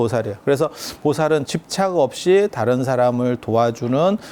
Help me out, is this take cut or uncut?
cut